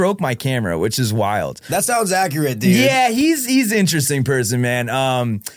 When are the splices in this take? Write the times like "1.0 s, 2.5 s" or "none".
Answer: none